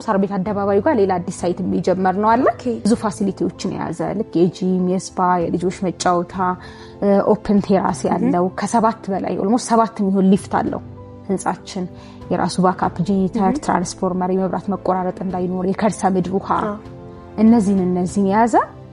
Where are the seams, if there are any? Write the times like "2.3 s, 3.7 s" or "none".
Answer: 2.9 s